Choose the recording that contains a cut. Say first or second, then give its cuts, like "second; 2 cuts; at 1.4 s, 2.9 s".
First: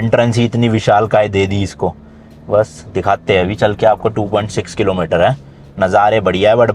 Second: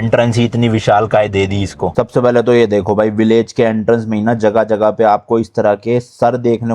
second; 1 cut; at 1.9 s